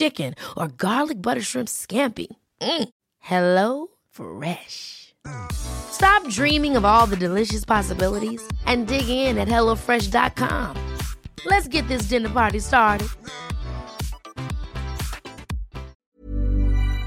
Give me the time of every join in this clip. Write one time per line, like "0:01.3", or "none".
0:15.9